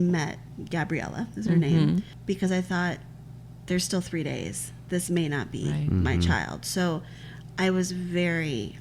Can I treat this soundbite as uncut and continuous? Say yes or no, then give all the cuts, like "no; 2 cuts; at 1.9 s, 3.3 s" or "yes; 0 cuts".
yes; 0 cuts